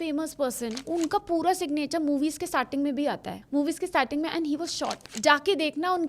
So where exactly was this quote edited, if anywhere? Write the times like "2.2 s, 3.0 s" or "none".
0.8 s, 3.3 s, 5.1 s